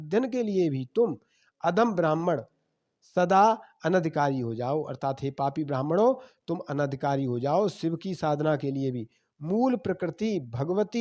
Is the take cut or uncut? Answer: uncut